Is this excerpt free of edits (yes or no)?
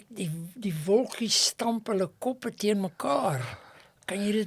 yes